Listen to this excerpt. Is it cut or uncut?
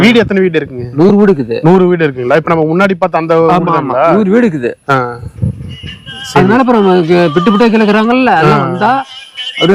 uncut